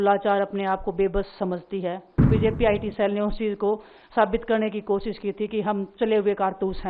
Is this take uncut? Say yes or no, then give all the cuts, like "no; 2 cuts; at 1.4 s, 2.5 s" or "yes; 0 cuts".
no; 1 cut; at 2.2 s